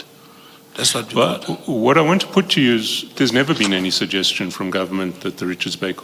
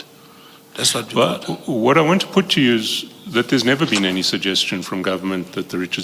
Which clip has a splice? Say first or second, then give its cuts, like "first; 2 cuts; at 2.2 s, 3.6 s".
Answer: first; 1 cut; at 3.1 s